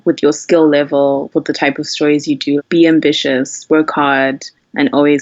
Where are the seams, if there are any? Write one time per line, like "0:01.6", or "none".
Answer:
0:02.6